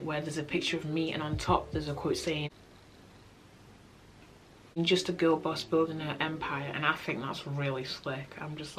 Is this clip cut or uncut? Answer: uncut